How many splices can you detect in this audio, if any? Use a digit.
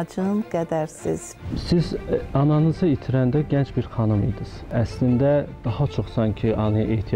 2